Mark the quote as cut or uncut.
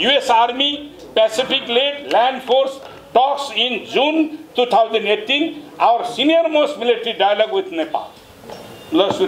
uncut